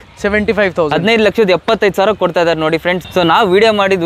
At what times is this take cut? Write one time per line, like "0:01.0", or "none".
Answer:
0:03.0